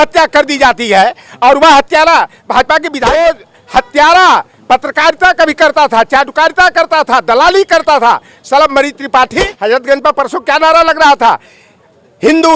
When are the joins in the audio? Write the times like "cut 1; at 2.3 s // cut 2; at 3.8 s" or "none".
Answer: cut 1; at 3.0 s // cut 2; at 9.5 s